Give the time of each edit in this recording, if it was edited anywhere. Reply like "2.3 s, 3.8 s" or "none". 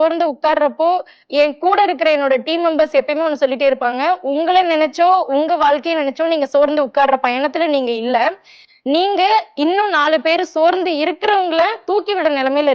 1.2 s